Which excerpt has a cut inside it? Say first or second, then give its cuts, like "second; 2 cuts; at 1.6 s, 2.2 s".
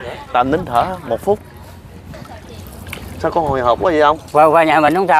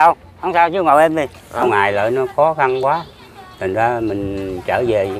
second; 1 cut; at 1.6 s